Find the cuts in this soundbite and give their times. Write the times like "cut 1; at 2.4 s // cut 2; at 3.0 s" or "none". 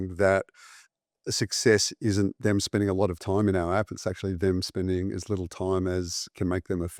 none